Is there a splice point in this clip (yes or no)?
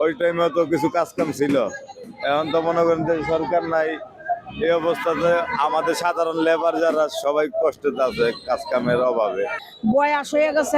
yes